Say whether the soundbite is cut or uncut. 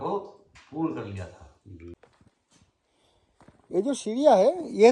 cut